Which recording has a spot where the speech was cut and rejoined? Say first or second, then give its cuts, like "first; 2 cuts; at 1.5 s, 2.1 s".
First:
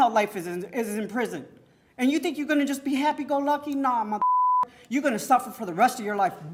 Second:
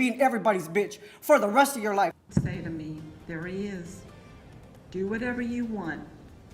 second; 1 cut; at 2.2 s